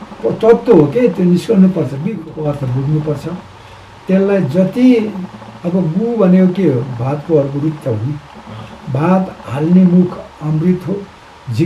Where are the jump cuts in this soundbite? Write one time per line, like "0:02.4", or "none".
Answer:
0:02.3